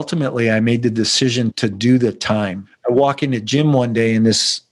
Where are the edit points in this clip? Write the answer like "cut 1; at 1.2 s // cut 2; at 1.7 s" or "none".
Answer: cut 1; at 2.8 s